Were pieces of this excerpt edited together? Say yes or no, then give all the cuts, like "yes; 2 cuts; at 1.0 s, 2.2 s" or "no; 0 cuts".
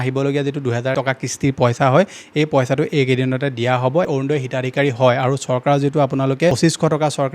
yes; 2 cuts; at 0.9 s, 4.1 s